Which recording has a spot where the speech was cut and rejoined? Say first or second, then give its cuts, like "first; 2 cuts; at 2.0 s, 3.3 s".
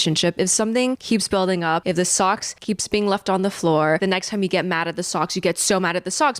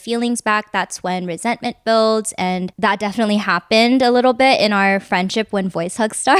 first; 3 cuts; at 1.0 s, 2.2 s, 4.0 s